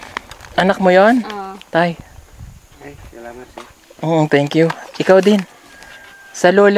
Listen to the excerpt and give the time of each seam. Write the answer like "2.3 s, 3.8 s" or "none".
none